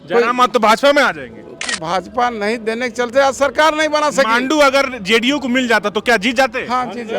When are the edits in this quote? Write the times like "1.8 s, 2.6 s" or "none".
1.6 s

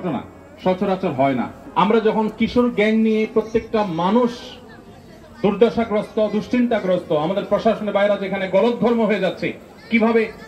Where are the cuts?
1.6 s

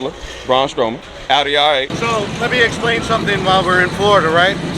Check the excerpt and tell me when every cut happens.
1.1 s, 1.9 s

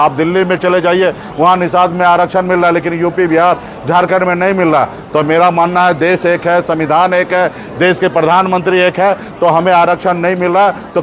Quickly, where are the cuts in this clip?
none

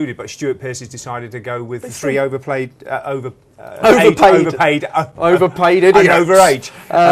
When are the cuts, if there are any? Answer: none

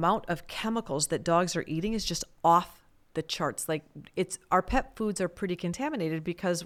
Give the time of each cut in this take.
none

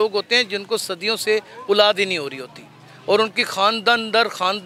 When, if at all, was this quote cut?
none

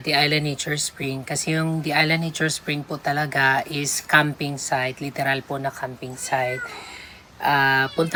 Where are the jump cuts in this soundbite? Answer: none

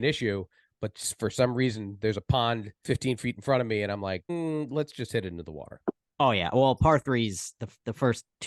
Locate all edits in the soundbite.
2.7 s, 4.2 s, 6.1 s

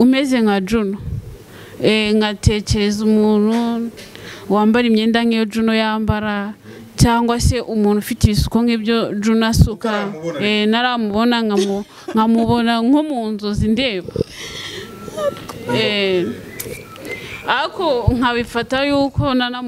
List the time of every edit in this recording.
none

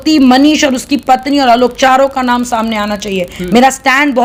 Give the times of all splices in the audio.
none

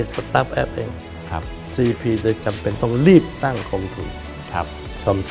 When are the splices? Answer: none

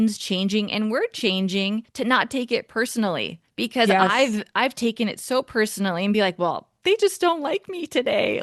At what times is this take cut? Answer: 1.9 s, 3.4 s

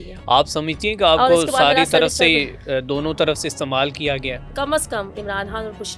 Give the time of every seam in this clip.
4.5 s

